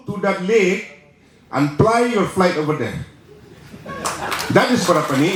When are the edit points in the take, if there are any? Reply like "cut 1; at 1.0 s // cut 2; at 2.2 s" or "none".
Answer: none